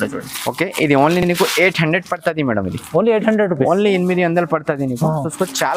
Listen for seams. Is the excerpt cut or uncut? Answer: uncut